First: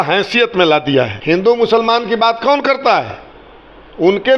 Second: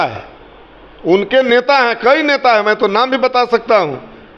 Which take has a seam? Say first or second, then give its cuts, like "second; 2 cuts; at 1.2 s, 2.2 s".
first; 1 cut; at 1.2 s